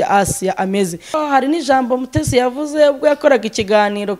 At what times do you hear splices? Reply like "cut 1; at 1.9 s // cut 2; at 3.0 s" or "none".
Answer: cut 1; at 1.2 s